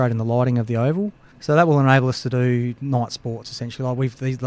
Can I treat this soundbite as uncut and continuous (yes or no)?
no